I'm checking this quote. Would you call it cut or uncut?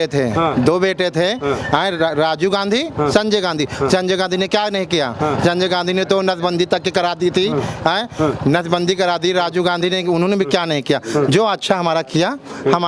uncut